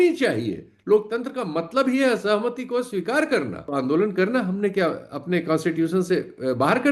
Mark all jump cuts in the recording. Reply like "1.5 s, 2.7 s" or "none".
3.6 s